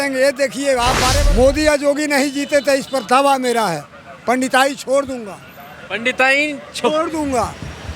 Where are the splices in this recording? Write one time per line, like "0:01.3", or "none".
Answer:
0:01.2